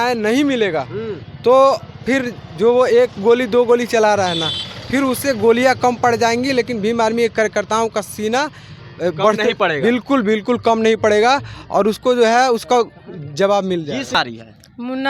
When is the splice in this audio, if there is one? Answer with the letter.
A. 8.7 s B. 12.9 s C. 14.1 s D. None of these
C